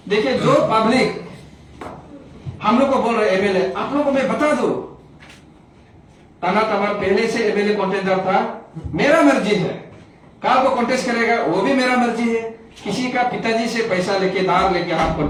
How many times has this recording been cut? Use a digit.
0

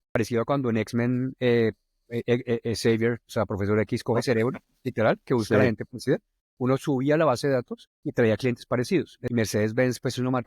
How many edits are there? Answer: 1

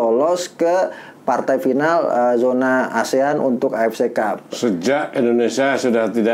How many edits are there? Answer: 0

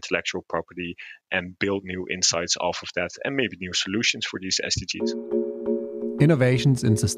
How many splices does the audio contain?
1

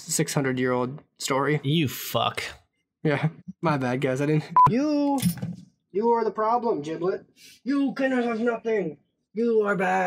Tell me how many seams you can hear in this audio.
1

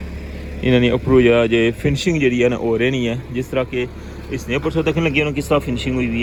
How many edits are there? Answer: 0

